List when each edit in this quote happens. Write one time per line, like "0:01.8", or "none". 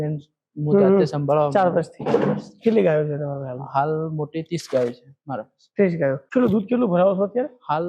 0:06.2